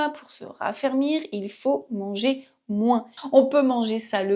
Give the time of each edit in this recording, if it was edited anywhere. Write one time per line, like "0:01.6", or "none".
0:03.1